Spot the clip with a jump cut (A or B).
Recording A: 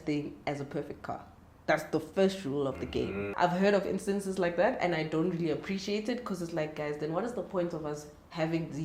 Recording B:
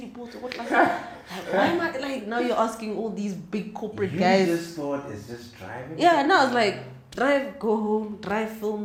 A